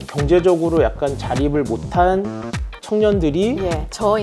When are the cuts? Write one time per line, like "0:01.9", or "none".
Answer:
none